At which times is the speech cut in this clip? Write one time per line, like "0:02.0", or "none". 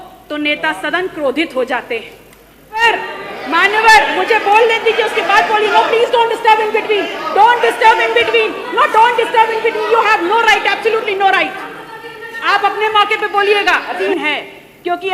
0:02.8
0:14.0